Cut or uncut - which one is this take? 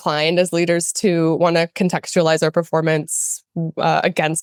uncut